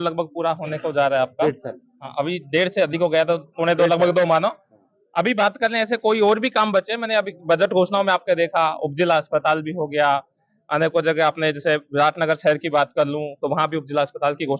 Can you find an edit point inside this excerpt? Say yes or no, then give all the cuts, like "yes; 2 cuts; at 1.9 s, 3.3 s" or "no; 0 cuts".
no; 0 cuts